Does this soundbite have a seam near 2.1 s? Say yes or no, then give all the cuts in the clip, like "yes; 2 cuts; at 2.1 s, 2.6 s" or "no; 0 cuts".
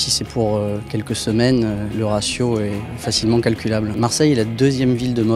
no; 1 cut; at 3.8 s